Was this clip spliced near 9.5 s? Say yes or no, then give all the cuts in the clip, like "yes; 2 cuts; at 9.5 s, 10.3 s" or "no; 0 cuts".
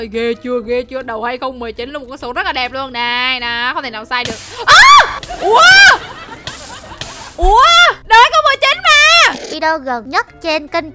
yes; 1 cut; at 9.5 s